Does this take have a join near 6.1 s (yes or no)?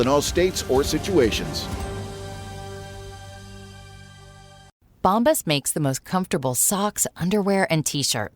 no